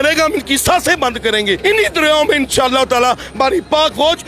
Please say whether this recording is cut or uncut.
cut